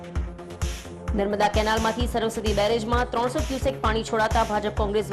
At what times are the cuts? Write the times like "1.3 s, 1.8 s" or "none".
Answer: 1.1 s

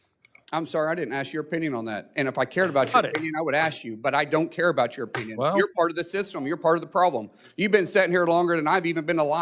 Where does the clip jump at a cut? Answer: none

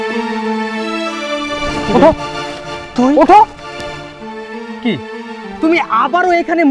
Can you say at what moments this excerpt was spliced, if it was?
none

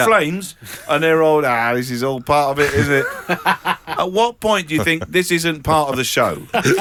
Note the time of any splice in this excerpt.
none

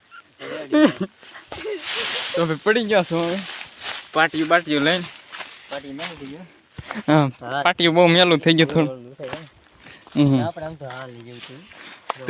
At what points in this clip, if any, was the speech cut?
none

